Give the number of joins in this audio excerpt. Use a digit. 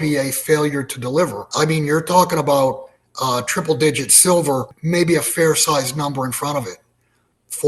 2